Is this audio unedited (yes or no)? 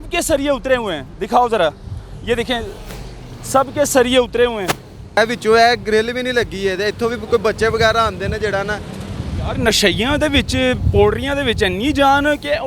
no